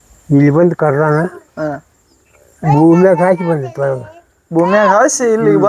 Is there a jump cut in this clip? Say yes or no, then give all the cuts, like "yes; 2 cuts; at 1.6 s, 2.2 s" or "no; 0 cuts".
no; 0 cuts